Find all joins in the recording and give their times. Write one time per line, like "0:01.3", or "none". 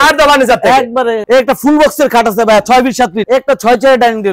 0:01.2
0:03.2